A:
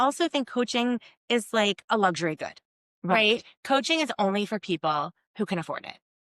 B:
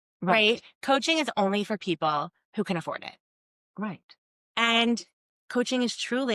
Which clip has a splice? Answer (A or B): B